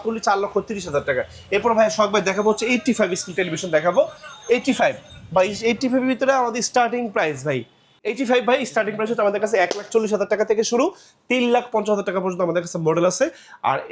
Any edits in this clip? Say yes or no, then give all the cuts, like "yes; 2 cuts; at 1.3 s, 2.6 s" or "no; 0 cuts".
no; 0 cuts